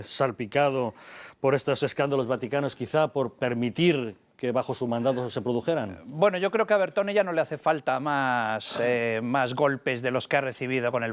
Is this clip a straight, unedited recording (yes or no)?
yes